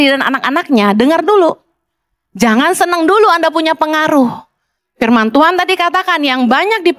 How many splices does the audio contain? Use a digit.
0